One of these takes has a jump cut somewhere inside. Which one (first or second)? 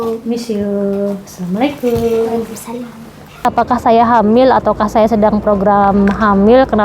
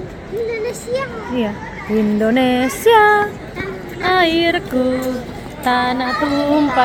first